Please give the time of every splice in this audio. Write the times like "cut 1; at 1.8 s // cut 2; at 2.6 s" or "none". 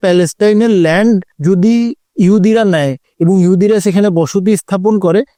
none